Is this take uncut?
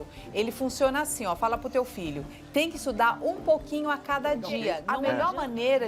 no; 1 cut; at 4.9 s

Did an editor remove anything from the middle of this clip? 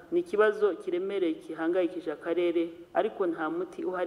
no; 0 cuts

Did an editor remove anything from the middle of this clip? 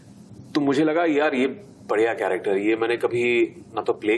no; 0 cuts

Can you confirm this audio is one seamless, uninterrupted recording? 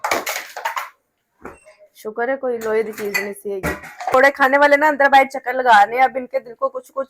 no; 1 cut; at 4.1 s

